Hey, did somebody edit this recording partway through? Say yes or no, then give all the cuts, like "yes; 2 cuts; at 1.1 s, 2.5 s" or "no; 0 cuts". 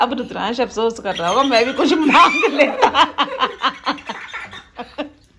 no; 0 cuts